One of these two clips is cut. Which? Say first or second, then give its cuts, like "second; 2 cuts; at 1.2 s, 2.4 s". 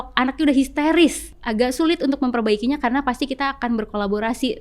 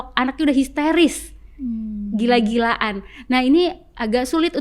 first; 1 cut; at 1.4 s